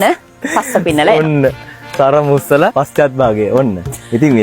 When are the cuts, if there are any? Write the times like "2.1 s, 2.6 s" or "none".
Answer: 2.7 s